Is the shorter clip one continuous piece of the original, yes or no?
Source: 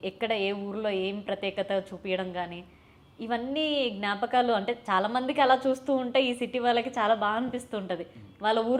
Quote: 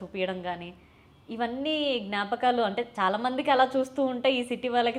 yes